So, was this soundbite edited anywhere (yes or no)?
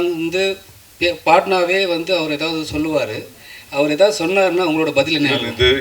no